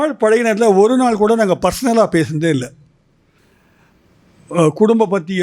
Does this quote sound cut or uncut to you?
uncut